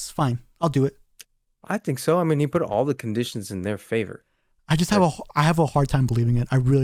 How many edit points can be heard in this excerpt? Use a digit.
0